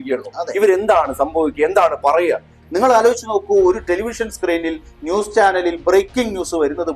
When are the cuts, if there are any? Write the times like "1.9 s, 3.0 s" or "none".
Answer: 2.5 s